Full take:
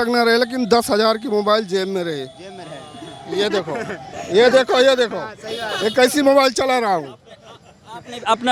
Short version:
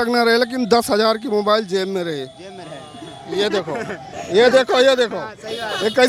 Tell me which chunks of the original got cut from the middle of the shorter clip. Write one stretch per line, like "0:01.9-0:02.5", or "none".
none